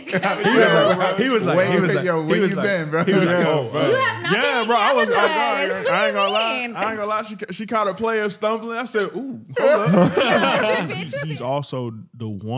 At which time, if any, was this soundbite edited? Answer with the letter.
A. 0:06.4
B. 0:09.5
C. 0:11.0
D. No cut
C